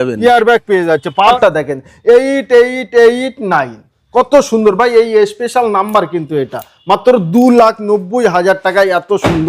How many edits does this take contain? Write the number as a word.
one